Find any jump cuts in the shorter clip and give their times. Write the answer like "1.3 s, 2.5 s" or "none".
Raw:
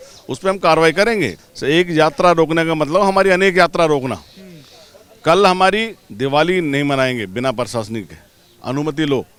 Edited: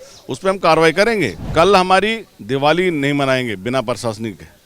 1.4 s